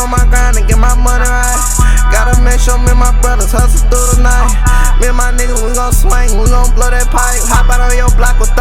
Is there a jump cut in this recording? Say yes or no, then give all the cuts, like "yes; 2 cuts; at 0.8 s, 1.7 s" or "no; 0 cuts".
no; 0 cuts